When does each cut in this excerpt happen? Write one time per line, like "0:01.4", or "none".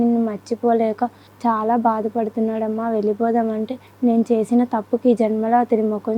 0:01.3
0:03.8